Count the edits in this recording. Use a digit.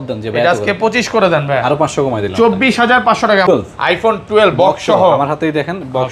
1